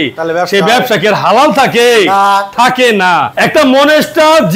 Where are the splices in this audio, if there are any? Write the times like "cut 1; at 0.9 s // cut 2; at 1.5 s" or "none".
cut 1; at 3.3 s